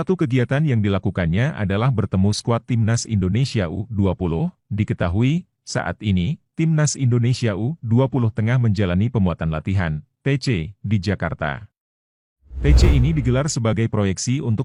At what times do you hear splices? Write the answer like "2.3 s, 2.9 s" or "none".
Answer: none